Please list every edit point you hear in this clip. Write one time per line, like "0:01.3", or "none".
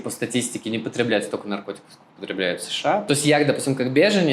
0:03.0